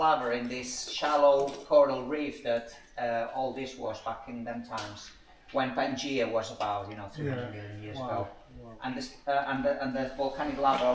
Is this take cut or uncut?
uncut